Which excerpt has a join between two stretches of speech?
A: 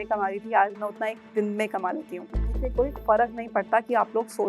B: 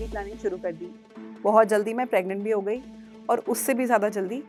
A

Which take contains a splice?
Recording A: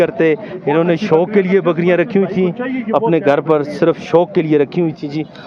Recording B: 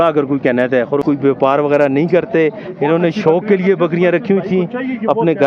B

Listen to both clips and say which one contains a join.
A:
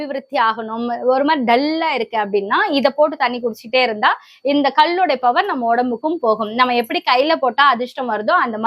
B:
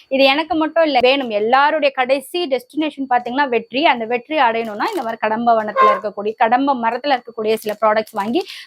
B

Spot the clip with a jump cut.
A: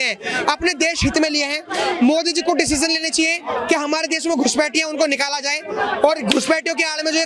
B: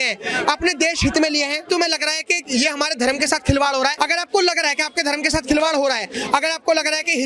B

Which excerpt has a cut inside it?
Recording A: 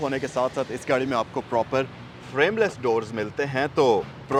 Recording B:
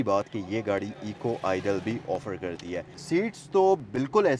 B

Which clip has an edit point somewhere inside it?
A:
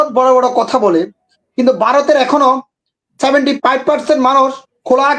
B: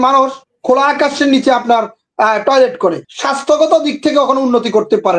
B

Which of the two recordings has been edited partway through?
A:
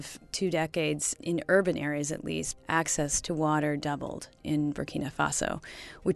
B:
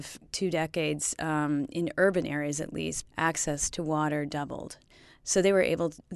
A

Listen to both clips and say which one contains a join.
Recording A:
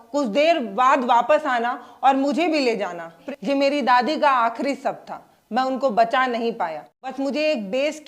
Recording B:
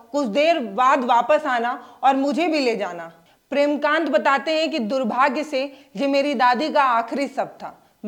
A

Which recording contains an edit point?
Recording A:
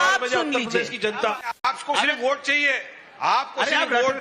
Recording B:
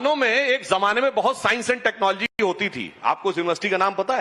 A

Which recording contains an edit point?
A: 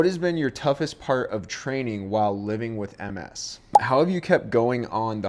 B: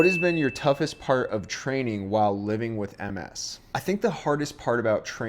A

